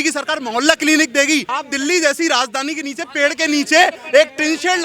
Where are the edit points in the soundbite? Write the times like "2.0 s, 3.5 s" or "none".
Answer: 1.5 s